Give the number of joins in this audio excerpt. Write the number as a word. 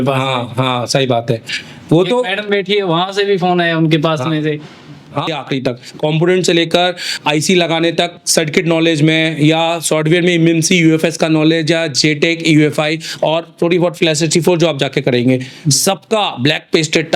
one